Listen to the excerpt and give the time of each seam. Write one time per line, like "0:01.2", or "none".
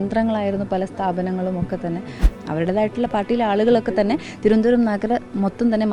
0:02.2